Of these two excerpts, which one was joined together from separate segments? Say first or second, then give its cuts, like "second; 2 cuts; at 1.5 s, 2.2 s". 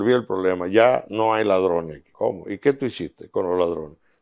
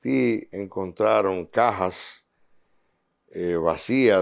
first; 1 cut; at 2.0 s